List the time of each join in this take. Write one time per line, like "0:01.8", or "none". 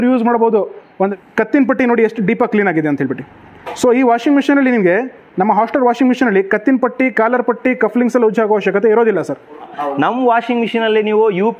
0:01.1
0:09.8